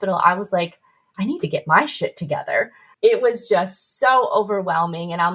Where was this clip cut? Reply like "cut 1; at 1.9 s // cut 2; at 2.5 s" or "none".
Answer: cut 1; at 2.8 s

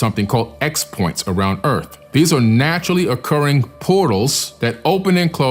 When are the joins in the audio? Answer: cut 1; at 2.0 s // cut 2; at 4.5 s

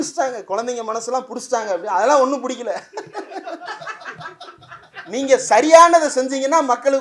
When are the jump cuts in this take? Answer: none

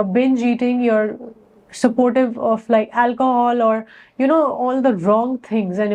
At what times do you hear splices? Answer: none

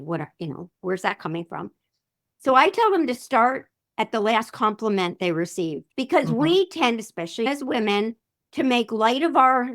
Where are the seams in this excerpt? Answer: cut 1; at 5.9 s // cut 2; at 7.5 s

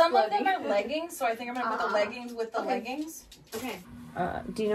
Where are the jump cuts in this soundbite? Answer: cut 1; at 3.8 s

